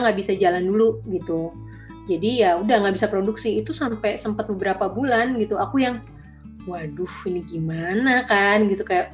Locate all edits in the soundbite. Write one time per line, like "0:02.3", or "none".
none